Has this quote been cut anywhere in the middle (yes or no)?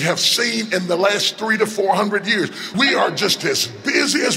yes